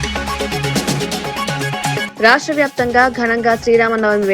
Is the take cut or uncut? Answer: cut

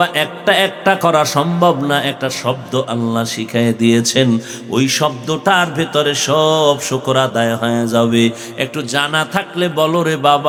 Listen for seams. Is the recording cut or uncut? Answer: uncut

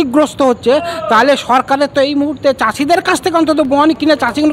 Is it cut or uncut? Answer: uncut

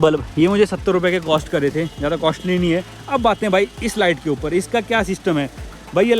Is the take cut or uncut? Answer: uncut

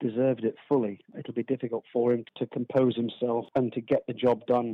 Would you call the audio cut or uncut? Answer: cut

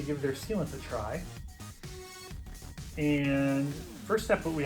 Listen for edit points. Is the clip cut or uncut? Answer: cut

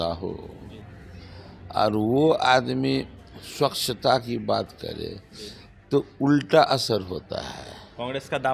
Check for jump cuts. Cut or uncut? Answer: uncut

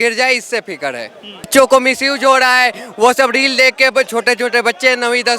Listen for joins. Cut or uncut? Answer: cut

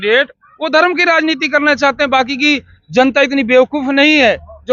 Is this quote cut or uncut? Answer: uncut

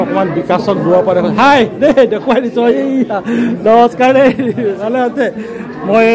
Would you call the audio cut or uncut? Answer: uncut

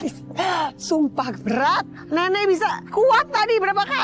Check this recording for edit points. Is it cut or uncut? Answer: cut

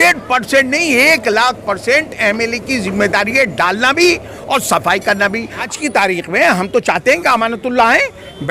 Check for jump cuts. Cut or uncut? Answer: cut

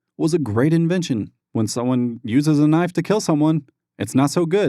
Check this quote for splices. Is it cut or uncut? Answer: cut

